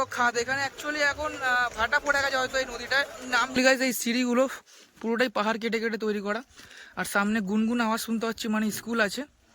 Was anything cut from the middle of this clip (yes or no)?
yes